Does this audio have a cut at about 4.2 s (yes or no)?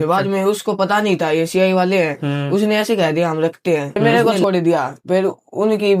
yes